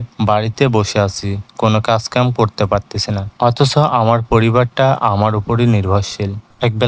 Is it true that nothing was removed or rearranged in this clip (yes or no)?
yes